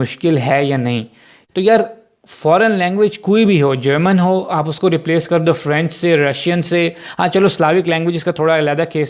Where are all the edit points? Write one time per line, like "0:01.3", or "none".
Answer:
0:01.4